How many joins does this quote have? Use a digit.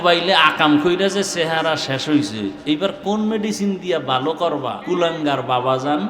1